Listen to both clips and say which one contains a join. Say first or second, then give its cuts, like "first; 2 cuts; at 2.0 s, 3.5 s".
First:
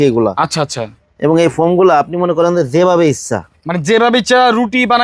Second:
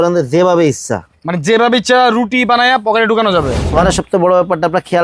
second; 1 cut; at 3.6 s